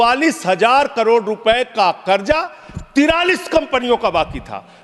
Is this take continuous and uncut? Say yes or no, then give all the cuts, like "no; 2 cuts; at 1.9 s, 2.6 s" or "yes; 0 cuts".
yes; 0 cuts